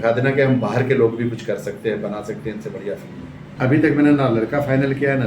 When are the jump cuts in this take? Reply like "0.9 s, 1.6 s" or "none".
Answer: 3.4 s